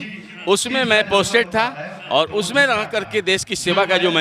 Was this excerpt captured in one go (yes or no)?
yes